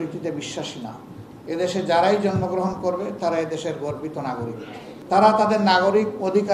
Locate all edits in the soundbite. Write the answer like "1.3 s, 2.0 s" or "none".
1.3 s, 4.9 s

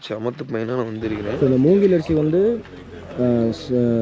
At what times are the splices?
1.3 s

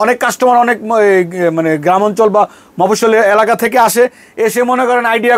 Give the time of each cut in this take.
none

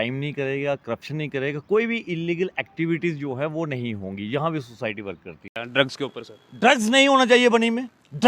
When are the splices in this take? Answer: 5.6 s

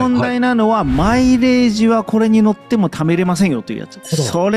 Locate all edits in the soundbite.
none

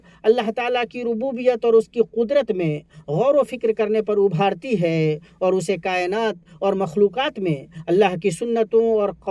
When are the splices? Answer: none

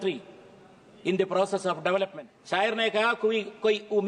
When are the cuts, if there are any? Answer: 2.3 s

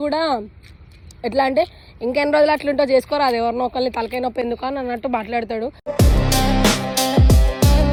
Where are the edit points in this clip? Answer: none

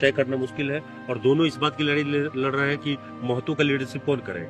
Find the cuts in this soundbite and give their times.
none

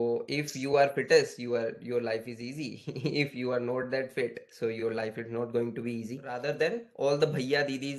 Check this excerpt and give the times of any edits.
6.2 s

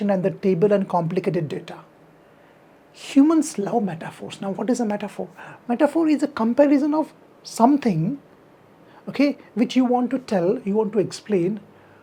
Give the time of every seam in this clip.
none

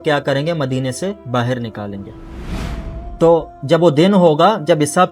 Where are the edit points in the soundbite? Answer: 2.6 s

